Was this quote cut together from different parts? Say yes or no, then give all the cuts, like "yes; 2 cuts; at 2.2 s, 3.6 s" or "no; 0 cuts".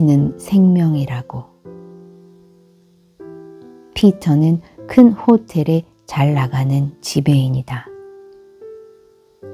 yes; 2 cuts; at 1.8 s, 3.5 s